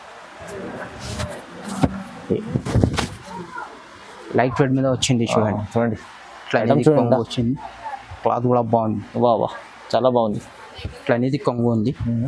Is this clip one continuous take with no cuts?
no; 1 cut; at 2.5 s

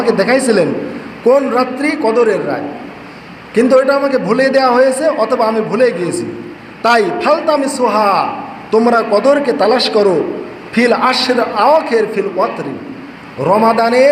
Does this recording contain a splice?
no; 0 cuts

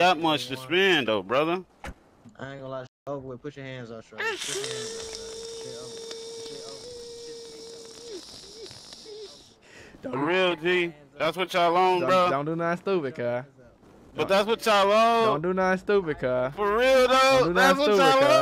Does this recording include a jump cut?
no; 0 cuts

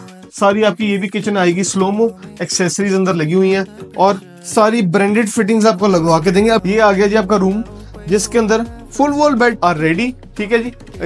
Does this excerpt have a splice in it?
yes; 2 cuts; at 6.6 s, 9.6 s

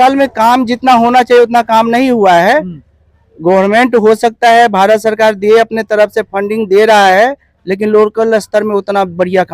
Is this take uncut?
yes; 0 cuts

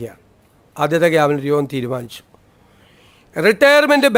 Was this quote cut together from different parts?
no; 0 cuts

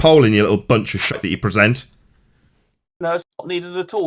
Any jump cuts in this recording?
yes; 1 cut; at 1.1 s

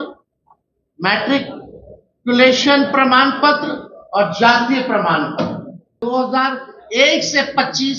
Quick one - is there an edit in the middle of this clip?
yes; 1 cut; at 6.0 s

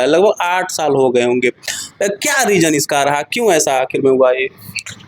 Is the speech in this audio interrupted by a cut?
no; 0 cuts

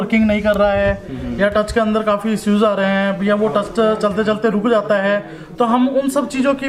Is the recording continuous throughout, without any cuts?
yes; 0 cuts

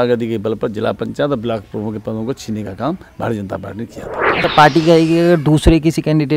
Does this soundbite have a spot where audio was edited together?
yes; 1 cut; at 4.4 s

